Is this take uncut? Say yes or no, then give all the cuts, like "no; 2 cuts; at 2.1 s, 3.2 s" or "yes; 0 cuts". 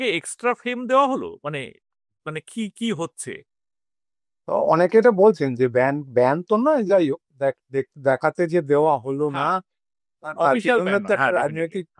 yes; 0 cuts